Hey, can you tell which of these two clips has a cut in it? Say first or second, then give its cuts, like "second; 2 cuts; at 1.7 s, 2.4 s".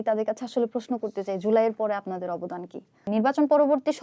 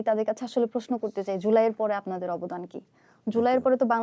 first; 1 cut; at 3.1 s